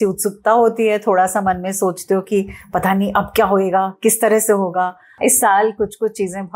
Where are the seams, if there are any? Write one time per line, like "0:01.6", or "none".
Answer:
0:05.0